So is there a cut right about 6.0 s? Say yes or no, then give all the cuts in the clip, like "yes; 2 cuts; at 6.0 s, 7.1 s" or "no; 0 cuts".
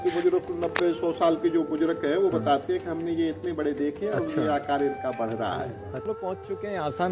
yes; 1 cut; at 6.0 s